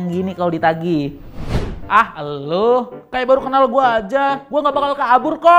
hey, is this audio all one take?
yes; 0 cuts

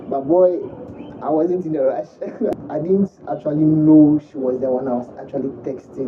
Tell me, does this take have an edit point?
yes; 1 cut; at 2.6 s

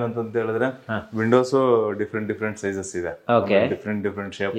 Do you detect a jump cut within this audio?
no; 0 cuts

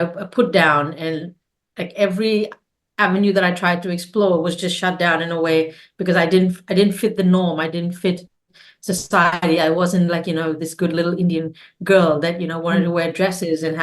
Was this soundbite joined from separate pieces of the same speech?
no; 0 cuts

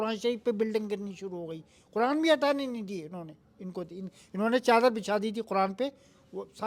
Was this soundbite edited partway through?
no; 0 cuts

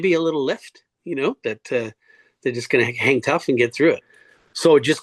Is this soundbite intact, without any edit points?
no; 1 cut; at 4.1 s

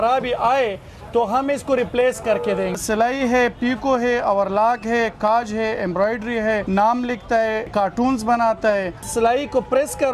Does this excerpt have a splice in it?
yes; 4 cuts; at 2.8 s, 6.6 s, 7.7 s, 9.0 s

